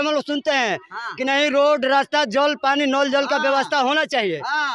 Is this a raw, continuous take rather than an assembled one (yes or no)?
yes